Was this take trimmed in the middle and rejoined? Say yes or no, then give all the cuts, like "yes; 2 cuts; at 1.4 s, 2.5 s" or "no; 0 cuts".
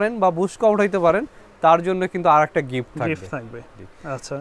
no; 0 cuts